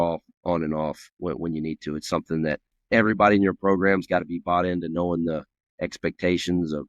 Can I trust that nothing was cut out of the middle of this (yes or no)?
no